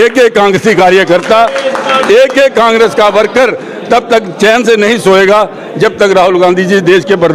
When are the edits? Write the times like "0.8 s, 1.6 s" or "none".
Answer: none